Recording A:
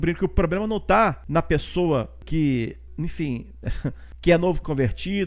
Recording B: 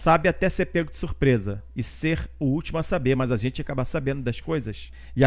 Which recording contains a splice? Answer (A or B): A